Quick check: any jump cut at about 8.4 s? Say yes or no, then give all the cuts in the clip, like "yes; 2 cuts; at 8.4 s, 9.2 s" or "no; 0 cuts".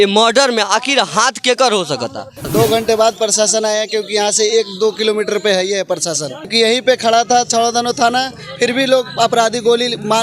no; 2 cuts; at 2.3 s, 6.5 s